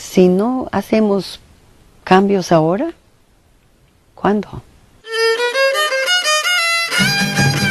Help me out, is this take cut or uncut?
uncut